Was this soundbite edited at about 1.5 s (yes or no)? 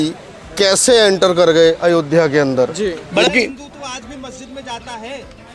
no